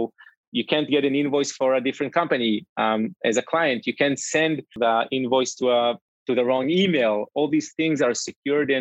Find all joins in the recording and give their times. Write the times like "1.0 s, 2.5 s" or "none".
4.7 s